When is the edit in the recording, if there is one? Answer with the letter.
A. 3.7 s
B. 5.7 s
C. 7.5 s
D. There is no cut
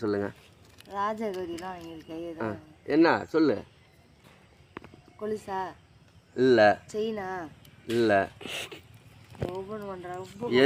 D